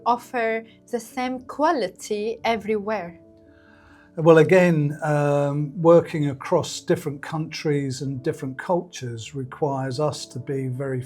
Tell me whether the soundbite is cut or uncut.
uncut